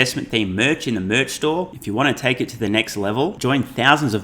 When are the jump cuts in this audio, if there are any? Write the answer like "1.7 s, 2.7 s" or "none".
none